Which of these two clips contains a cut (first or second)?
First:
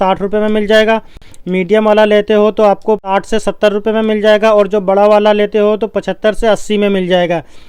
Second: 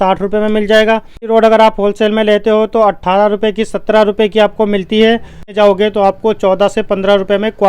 second